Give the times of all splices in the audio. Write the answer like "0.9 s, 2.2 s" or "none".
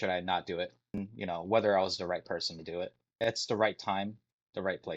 1.1 s, 3.2 s